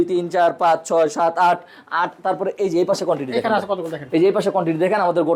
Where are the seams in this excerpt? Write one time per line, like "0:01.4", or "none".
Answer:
none